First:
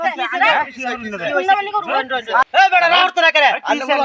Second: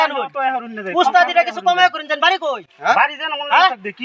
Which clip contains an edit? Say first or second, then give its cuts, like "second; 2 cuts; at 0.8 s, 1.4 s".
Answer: first; 1 cut; at 2.5 s